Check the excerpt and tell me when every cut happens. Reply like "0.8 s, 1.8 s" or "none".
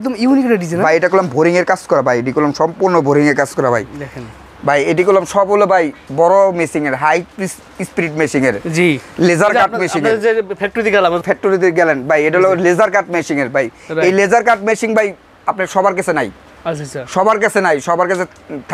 none